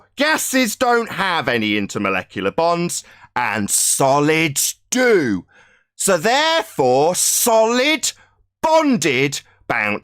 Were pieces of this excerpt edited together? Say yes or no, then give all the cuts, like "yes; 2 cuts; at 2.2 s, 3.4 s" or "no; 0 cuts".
no; 0 cuts